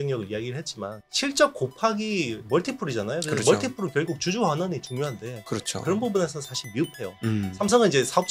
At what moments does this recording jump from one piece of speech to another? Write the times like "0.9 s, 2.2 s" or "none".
1.0 s